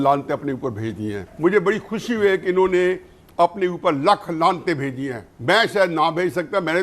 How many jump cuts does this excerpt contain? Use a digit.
1